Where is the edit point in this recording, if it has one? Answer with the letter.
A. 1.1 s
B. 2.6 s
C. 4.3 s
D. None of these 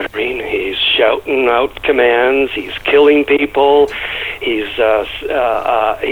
D